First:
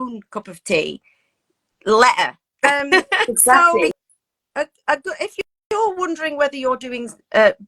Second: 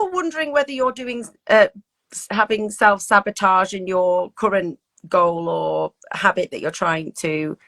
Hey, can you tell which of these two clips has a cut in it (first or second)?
first